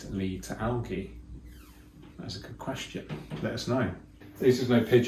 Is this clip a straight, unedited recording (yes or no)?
no